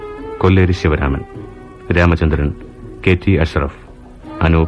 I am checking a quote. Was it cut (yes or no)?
no